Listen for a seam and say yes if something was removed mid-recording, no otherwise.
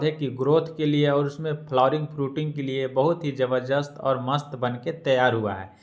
no